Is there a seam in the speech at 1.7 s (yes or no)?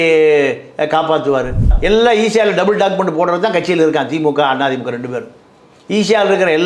yes